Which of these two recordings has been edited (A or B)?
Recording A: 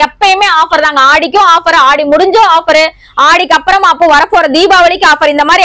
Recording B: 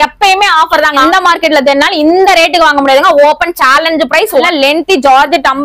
B